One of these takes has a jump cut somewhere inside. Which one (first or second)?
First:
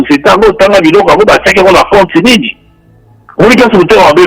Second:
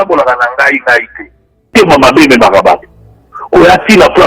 second